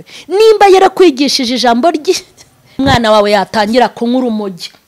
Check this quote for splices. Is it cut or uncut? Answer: cut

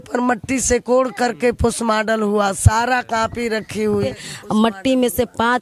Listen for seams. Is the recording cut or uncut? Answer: cut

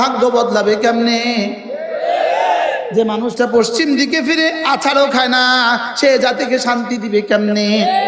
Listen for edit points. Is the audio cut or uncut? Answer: uncut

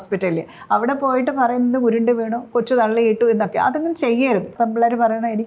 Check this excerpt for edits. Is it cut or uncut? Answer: cut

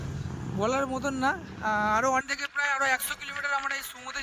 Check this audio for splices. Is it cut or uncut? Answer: cut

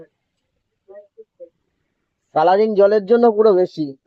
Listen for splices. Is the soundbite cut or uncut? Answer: uncut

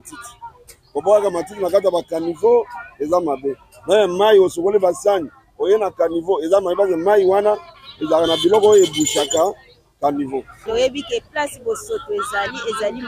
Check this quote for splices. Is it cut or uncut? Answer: cut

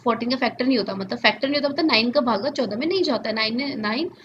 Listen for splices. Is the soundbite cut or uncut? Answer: uncut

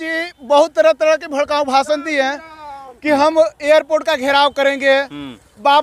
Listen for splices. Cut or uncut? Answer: uncut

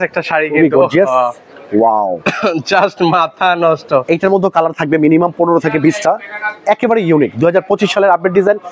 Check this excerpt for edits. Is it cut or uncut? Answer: uncut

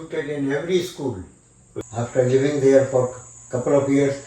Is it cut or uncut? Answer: cut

